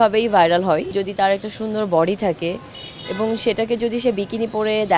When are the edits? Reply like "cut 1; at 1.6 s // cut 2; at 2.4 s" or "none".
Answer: cut 1; at 0.9 s